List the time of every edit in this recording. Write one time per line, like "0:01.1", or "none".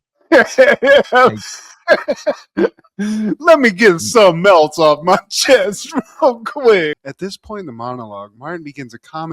0:07.0